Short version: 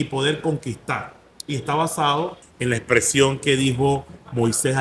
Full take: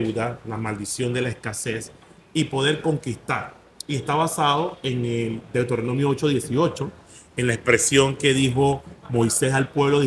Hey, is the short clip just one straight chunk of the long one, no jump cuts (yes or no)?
no